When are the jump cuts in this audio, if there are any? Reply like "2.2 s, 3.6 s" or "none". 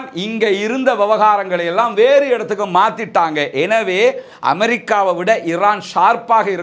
none